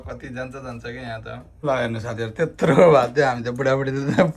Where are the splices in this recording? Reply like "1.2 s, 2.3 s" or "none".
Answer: 1.4 s